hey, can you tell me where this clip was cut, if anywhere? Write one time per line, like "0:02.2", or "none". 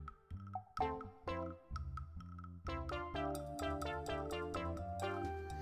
none

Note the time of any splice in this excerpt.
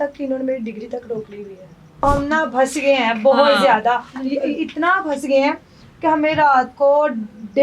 0:02.0

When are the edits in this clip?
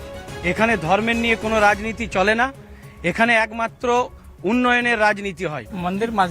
none

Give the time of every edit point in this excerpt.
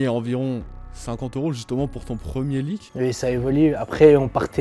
0:02.9

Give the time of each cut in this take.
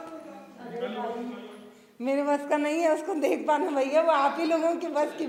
none

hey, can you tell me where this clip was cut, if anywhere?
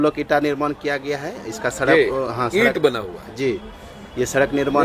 none

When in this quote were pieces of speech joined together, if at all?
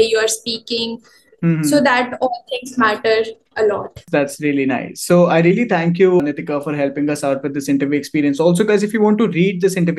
none

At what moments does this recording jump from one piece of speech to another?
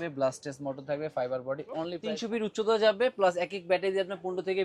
0:02.0

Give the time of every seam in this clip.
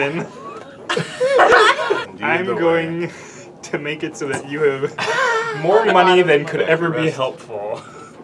0:01.5

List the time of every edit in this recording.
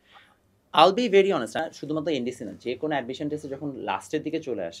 0:01.6

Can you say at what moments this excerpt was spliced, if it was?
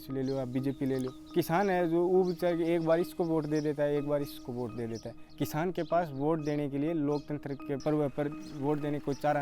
0:01.3
0:07.8

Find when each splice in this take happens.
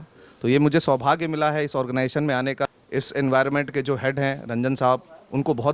0:02.7

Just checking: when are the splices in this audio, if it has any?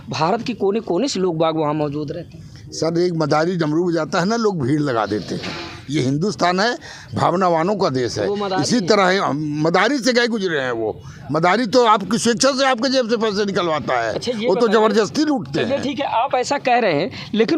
none

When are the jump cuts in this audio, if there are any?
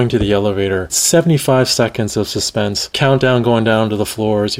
0:00.9
0:02.9

